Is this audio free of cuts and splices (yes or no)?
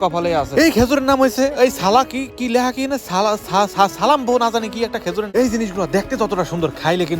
no